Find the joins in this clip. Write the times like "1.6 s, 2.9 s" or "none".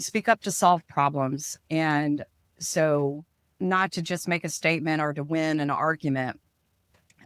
none